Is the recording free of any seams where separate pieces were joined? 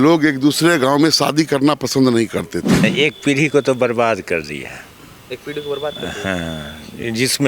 no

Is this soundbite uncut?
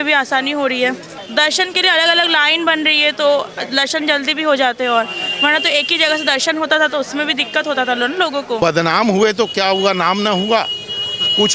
no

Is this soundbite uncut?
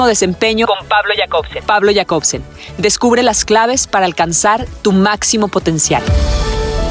yes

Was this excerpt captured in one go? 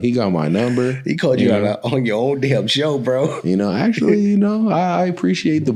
yes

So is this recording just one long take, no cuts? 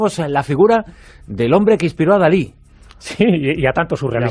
no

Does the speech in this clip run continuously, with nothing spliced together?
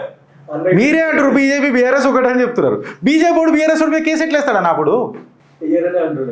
yes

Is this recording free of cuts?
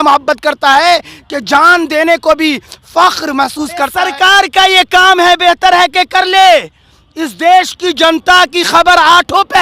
no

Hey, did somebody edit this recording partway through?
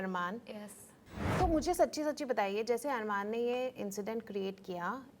yes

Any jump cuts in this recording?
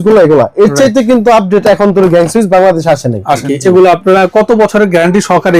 yes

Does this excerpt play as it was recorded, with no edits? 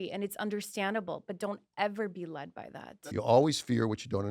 no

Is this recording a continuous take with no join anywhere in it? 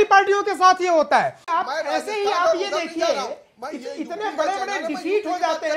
no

